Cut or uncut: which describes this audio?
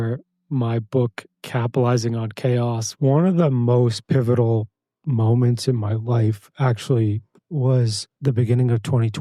cut